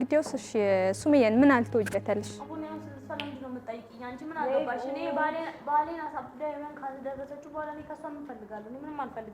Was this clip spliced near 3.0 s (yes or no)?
no